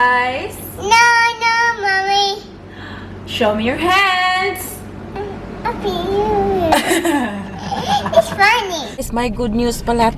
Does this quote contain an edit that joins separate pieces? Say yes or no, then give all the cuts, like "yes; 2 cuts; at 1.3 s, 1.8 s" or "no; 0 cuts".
yes; 1 cut; at 9.0 s